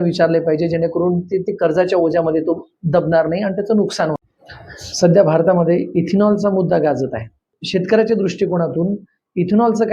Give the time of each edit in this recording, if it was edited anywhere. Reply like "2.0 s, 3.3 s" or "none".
4.2 s